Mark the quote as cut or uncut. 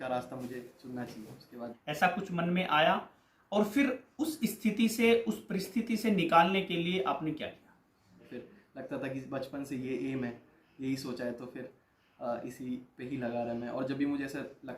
cut